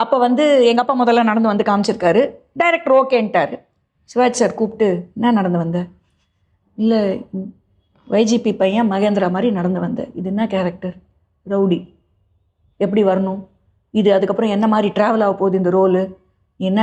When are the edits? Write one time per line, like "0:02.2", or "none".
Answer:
none